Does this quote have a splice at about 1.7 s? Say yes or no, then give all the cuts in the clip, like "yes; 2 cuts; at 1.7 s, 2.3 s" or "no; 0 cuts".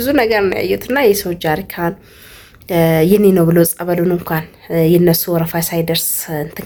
no; 0 cuts